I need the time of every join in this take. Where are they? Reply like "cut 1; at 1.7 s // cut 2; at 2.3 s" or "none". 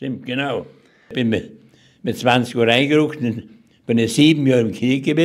cut 1; at 1.0 s